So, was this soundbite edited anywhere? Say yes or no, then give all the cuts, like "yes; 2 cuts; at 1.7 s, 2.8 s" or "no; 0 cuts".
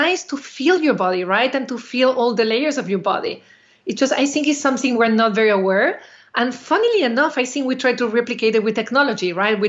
no; 0 cuts